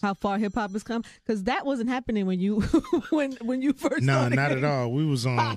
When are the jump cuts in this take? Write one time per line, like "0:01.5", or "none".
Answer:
0:01.2